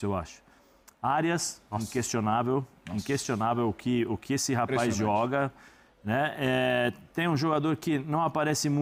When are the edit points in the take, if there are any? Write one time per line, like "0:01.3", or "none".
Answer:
none